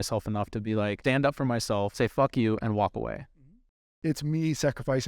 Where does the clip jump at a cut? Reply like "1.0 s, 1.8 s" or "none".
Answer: 1.0 s, 1.9 s, 3.9 s